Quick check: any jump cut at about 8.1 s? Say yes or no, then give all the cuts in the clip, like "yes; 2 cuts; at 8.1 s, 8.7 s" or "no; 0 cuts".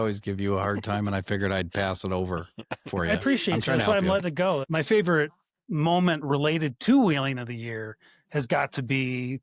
no; 1 cut; at 4.7 s